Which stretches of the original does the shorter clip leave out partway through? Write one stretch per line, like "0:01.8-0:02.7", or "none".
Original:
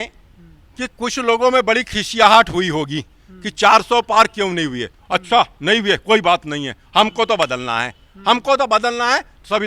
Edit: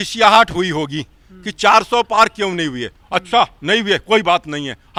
none